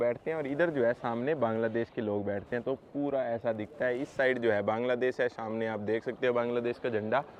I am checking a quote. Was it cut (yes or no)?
no